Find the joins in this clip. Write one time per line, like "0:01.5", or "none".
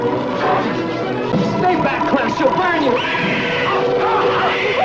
0:01.3